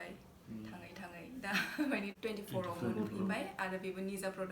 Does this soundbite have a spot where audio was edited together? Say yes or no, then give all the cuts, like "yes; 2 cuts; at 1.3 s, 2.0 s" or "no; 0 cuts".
yes; 1 cut; at 2.1 s